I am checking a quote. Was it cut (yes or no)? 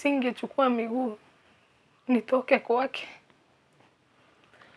no